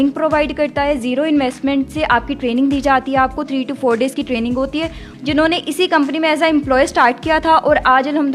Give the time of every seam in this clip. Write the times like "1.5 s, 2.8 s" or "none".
5.0 s